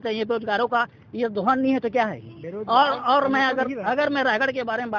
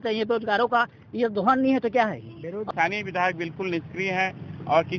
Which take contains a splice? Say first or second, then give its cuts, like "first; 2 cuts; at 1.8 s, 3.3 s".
second; 1 cut; at 2.6 s